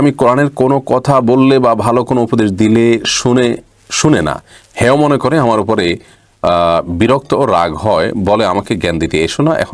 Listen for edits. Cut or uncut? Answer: uncut